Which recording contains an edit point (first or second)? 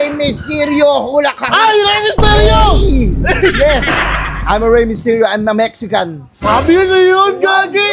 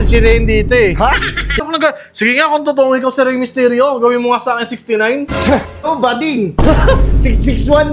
second